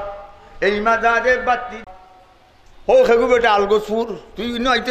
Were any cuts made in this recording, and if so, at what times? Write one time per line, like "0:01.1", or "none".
0:01.8